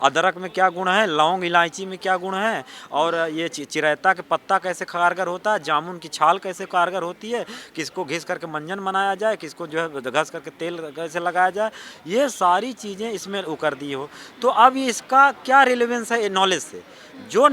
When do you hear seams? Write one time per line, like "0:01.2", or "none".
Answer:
none